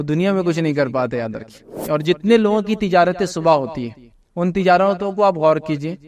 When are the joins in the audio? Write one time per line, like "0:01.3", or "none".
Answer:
0:01.7